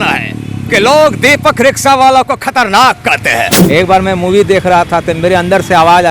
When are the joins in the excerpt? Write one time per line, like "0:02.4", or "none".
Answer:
0:03.6